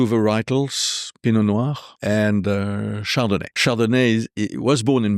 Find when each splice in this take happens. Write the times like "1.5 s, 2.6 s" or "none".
1.9 s, 3.6 s